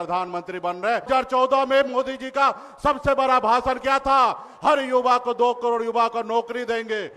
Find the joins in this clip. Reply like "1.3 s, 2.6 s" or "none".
1.1 s